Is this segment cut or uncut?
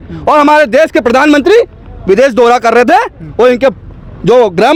uncut